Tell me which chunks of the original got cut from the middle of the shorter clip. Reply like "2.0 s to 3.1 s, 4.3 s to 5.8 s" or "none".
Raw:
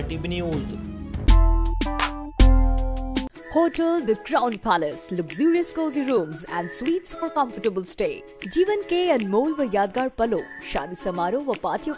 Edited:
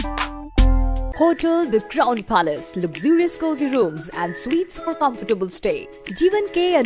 2.9 s to 3.4 s